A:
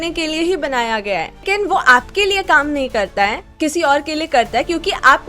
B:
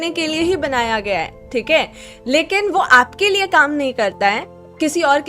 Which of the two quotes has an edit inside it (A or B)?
A